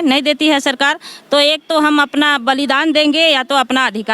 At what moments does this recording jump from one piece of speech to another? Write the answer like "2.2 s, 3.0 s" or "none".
none